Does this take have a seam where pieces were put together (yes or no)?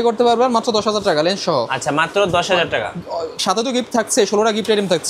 no